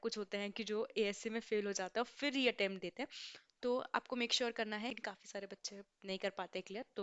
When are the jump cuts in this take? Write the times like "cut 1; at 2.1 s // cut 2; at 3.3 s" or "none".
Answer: cut 1; at 5.0 s

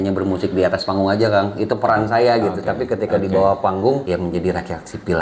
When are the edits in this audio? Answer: cut 1; at 4.0 s

